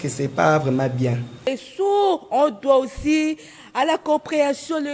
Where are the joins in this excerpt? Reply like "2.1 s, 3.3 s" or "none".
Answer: 1.5 s